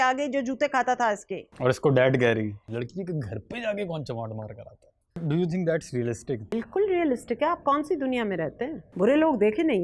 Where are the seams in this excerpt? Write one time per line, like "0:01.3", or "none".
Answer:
0:02.6
0:05.2
0:06.5
0:08.8